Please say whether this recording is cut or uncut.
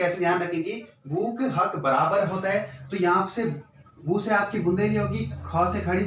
uncut